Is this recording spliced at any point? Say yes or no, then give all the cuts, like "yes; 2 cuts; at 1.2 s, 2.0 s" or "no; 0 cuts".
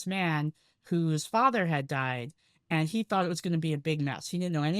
no; 0 cuts